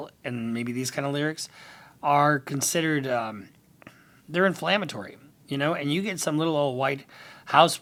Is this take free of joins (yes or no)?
yes